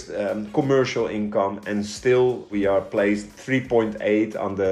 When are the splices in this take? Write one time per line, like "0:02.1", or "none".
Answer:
0:02.5

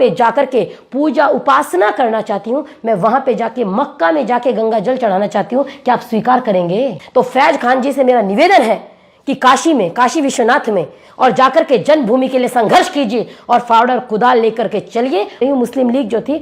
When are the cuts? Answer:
0:07.0
0:15.4

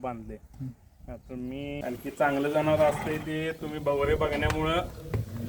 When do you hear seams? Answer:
0:01.8

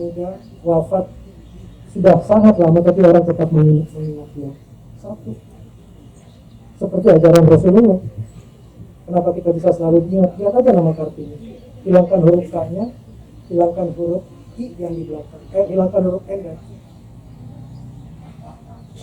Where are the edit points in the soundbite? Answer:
none

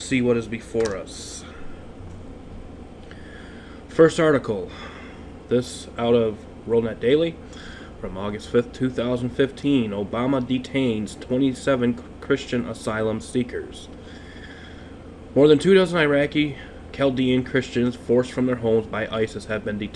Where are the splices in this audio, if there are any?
0:02.6

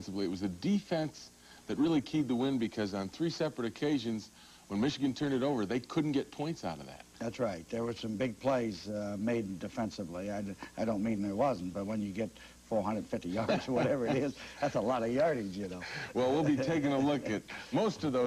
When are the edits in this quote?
0:10.3

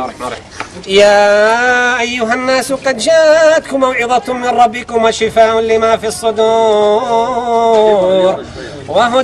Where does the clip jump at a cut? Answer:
none

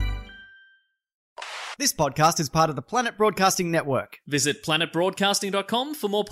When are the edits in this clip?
0:01.3

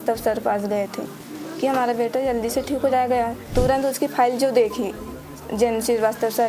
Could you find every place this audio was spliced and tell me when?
0:03.5

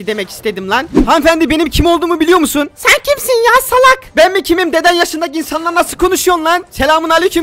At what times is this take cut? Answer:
0:01.0

